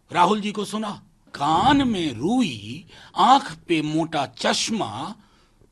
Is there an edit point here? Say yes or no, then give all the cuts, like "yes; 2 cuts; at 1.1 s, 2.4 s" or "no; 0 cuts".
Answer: yes; 1 cut; at 1.3 s